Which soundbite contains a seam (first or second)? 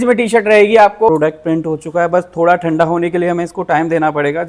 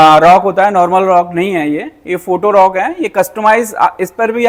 first